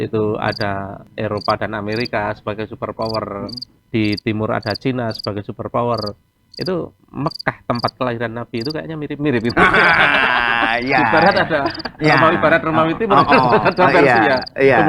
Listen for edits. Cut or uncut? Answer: cut